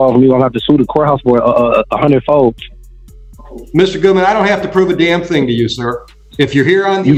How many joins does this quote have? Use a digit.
0